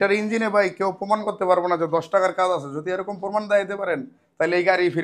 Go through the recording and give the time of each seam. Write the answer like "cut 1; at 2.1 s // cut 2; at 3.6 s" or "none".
none